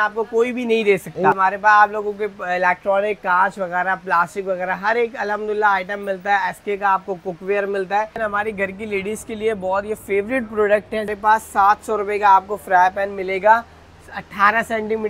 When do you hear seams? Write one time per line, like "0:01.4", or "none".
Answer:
0:01.4
0:08.1
0:11.1

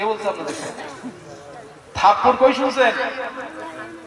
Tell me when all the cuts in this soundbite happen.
none

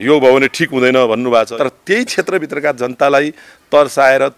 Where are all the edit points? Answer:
0:01.5

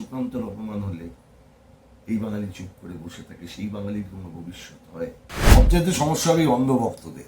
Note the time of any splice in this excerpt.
0:05.3

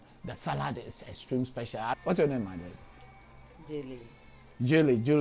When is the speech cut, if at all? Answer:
0:01.9

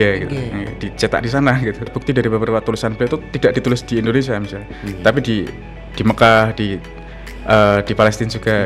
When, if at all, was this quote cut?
0:02.0

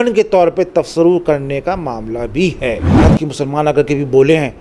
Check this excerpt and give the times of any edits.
0:03.0

